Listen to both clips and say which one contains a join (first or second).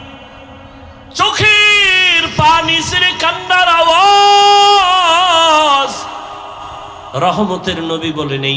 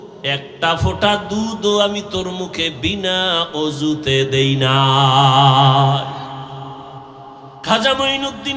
second